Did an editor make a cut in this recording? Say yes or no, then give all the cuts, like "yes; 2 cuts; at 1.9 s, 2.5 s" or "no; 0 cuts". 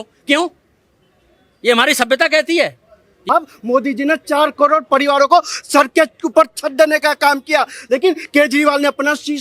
yes; 1 cut; at 3.3 s